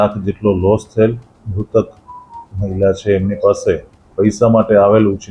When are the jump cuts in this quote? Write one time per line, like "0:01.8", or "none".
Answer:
0:01.4
0:04.0